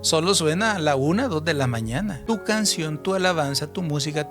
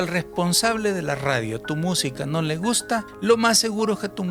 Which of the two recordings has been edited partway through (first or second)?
first